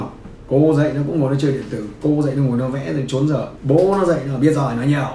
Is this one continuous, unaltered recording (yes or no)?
no